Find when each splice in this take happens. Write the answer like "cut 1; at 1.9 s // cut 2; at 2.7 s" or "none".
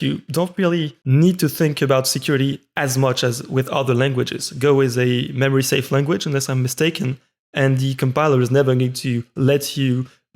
cut 1; at 1.0 s